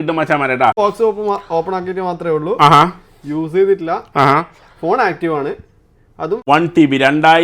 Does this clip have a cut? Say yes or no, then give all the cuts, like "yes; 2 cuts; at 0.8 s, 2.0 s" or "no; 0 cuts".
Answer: yes; 2 cuts; at 0.8 s, 6.4 s